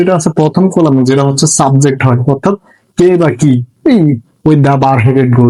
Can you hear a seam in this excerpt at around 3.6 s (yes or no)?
no